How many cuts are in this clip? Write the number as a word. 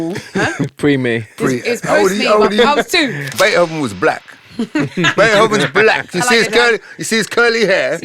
one